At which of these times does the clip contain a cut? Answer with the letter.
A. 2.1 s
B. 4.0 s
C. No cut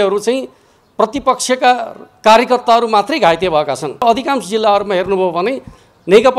B